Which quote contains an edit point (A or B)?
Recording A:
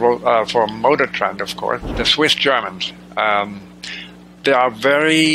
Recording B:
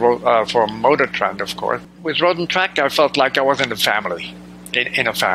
A